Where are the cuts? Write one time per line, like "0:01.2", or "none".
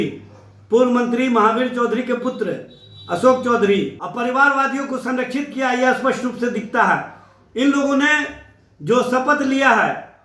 0:04.0